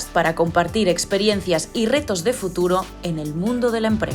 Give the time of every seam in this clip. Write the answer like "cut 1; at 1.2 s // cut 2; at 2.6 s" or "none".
none